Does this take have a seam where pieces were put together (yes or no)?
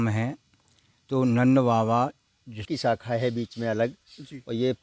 yes